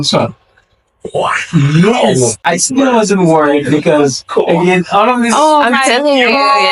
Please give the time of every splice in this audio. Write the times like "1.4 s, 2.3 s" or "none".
none